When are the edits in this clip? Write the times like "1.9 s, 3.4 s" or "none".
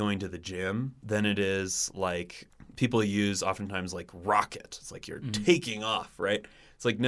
1.0 s, 2.4 s